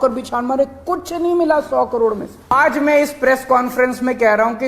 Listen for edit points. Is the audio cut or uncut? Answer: cut